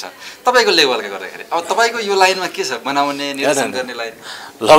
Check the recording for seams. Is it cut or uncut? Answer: uncut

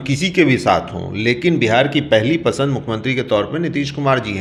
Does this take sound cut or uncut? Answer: uncut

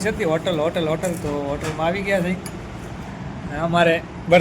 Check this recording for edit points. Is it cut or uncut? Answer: cut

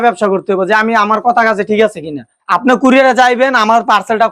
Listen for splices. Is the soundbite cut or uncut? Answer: uncut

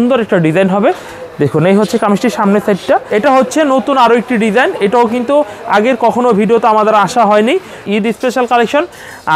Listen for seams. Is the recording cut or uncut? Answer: cut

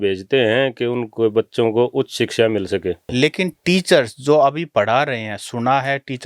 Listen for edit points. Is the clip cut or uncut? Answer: cut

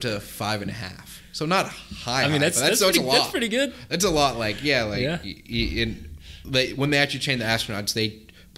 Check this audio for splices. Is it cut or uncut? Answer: uncut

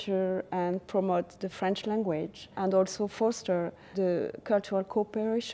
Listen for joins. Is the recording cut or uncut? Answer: cut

